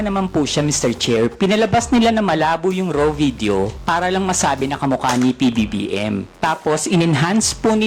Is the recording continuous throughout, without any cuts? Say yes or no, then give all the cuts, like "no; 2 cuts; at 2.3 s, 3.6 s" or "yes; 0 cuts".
yes; 0 cuts